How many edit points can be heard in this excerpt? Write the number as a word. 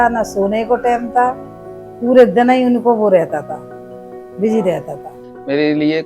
zero